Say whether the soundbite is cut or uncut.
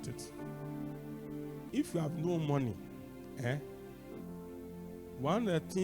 cut